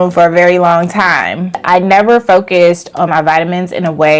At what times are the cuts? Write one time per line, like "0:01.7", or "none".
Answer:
0:01.6